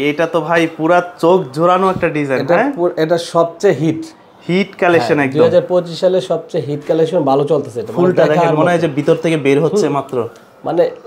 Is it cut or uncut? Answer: uncut